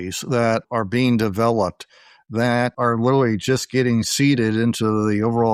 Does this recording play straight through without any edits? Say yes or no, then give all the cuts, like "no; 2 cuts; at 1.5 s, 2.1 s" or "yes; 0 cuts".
yes; 0 cuts